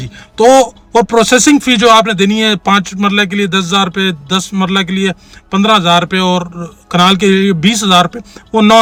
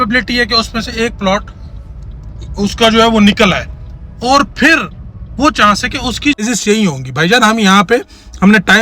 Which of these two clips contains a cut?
second; 1 cut; at 6.4 s

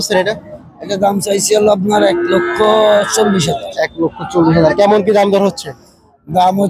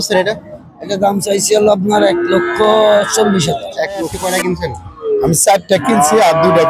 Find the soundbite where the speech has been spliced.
second; 1 cut; at 4.1 s

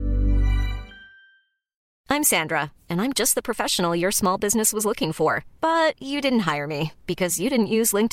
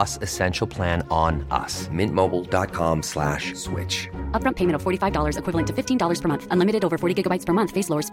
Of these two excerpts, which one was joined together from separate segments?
first; 1 cut; at 1.9 s

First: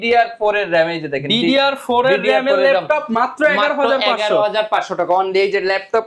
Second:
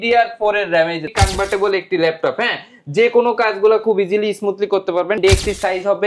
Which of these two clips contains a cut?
second; 2 cuts; at 1.1 s, 5.2 s

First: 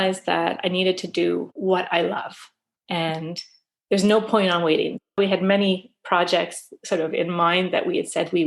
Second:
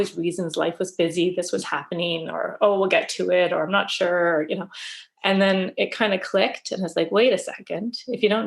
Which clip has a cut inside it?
first; 2 cuts; at 1.5 s, 5.0 s

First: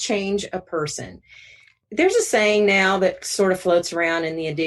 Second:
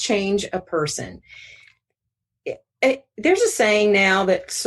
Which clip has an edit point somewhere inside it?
first; 1 cut; at 1.8 s

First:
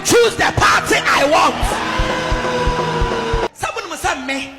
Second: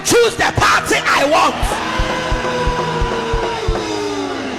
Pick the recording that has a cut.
first; 1 cut; at 3.5 s

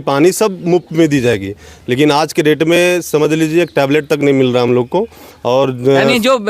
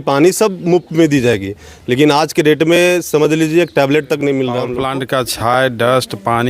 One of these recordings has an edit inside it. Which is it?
second; 1 cut; at 4.7 s

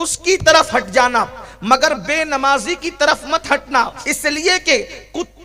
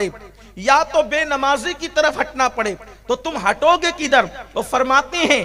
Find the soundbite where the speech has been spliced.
first; 1 cut; at 4.0 s

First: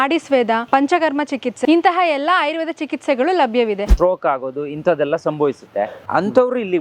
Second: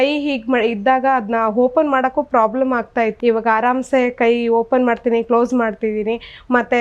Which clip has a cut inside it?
first; 2 cuts; at 3.9 s, 6.0 s

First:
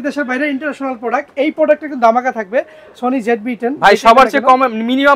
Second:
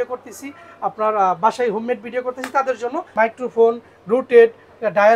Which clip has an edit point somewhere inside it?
second; 1 cut; at 3.0 s

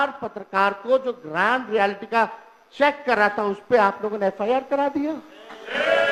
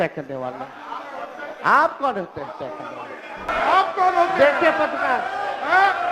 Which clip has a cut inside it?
second; 1 cut; at 3.5 s

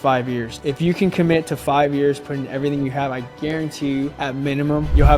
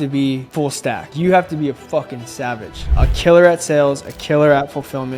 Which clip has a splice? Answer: second; 2 cuts; at 1.1 s, 2.9 s

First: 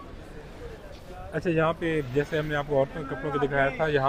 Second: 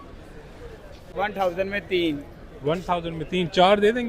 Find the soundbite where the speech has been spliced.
second; 1 cut; at 1.0 s

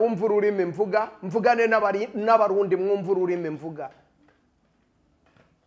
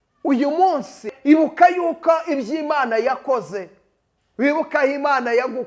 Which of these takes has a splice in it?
second; 1 cut; at 1.1 s

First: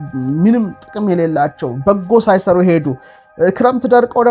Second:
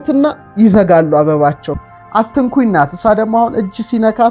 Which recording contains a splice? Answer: second; 1 cut; at 1.7 s

